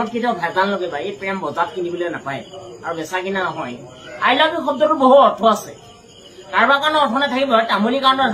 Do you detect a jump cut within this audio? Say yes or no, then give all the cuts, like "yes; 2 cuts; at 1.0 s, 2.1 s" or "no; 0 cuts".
no; 0 cuts